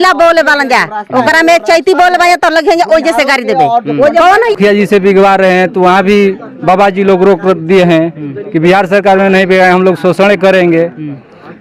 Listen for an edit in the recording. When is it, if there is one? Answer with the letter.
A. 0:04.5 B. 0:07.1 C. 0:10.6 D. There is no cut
A